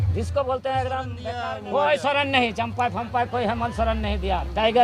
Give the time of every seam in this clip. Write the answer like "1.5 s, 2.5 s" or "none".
1.2 s